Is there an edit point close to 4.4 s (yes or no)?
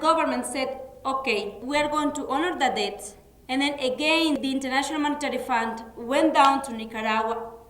yes